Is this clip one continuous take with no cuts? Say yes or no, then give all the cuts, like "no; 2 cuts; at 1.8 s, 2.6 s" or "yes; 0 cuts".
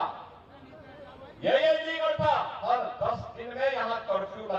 no; 1 cut; at 2.6 s